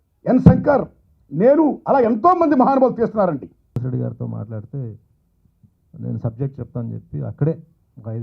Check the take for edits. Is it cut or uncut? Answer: cut